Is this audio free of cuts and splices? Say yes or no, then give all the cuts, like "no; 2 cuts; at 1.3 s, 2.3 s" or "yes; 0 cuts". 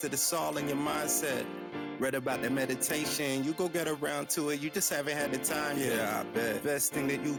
yes; 0 cuts